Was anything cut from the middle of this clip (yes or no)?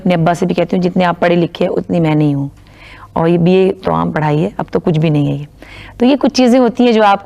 no